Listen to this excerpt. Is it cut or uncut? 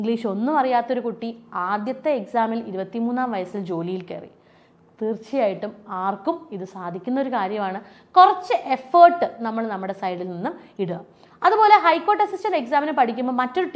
uncut